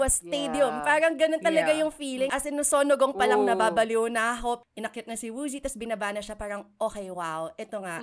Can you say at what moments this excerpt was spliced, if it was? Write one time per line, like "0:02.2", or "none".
0:02.3
0:04.6